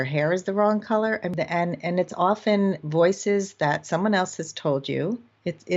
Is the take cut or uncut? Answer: cut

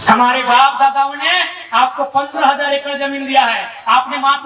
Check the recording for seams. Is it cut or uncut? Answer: uncut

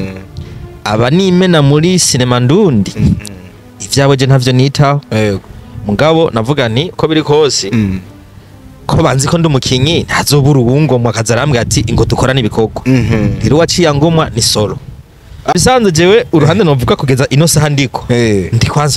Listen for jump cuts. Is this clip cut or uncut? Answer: cut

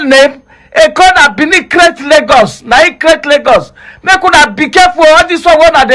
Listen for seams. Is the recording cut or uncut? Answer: uncut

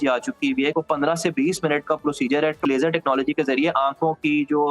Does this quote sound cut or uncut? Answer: cut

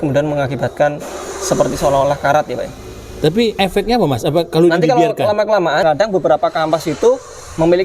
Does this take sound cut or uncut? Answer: cut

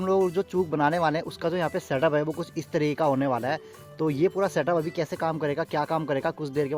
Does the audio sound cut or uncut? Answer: uncut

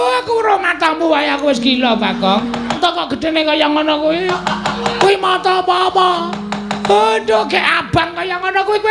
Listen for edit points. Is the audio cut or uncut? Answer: cut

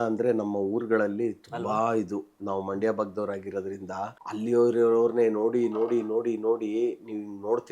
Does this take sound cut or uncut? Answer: cut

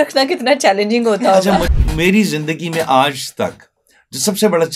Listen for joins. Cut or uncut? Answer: cut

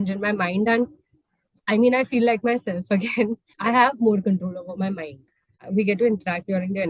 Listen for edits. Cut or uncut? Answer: cut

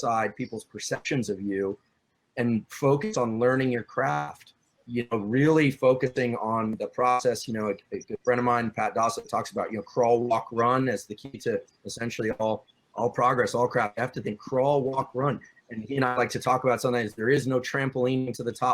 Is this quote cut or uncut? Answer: cut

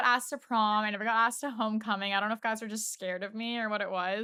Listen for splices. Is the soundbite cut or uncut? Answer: uncut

